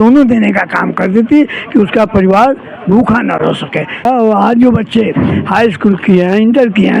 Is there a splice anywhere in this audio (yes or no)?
yes